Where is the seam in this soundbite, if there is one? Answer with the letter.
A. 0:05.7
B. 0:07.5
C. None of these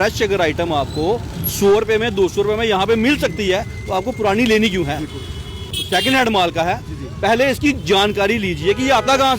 A